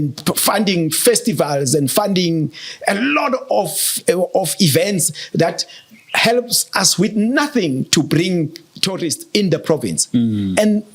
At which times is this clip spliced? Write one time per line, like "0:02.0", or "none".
none